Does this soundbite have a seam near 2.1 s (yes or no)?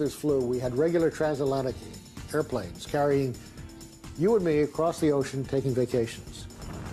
yes